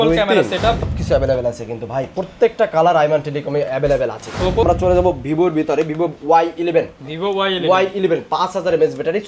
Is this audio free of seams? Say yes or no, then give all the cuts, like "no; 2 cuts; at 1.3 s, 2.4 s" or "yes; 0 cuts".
no; 2 cuts; at 0.9 s, 4.6 s